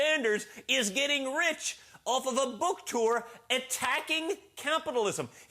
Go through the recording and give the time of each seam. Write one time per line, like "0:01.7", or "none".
0:01.6

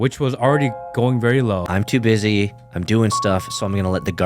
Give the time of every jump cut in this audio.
0:01.6

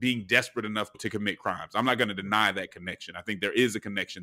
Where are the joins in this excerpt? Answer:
0:01.0

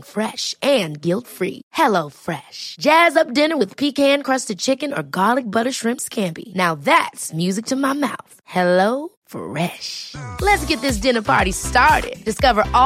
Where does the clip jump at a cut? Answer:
none

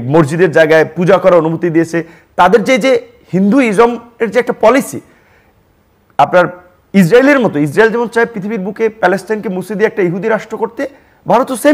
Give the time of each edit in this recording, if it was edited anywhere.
0:02.0

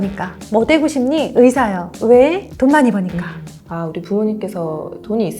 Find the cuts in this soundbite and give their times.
0:03.4

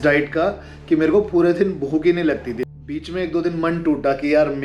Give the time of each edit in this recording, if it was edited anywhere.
0:02.6

